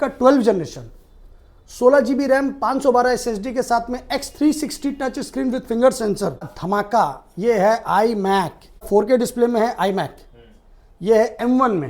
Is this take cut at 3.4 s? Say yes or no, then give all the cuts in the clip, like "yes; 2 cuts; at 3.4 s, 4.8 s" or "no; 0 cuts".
no; 2 cuts; at 6.5 s, 8.9 s